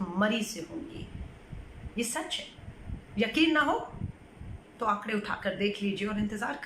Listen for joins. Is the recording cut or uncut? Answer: uncut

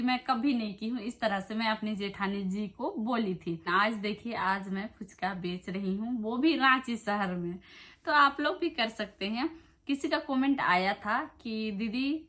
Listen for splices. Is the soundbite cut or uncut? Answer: cut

